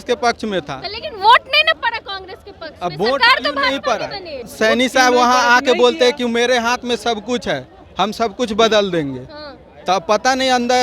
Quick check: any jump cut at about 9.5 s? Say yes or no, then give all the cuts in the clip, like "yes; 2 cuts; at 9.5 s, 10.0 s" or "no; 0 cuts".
no; 1 cut; at 4.4 s